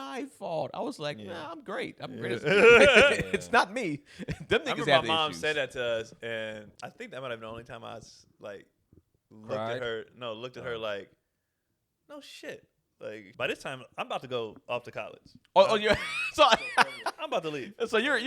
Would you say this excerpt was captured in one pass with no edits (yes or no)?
no